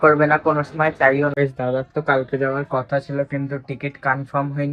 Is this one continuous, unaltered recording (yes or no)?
no